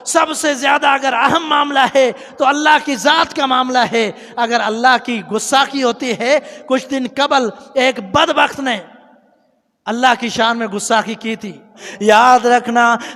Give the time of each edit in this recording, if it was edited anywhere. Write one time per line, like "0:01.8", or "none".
0:11.9